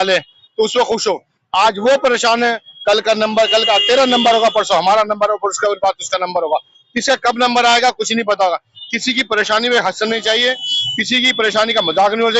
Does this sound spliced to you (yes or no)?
no